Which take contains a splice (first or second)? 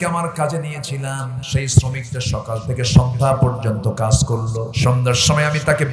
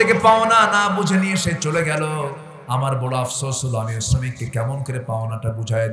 first